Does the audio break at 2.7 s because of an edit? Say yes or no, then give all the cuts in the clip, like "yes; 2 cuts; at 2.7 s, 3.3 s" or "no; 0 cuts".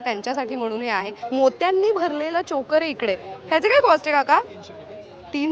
no; 1 cut; at 1.2 s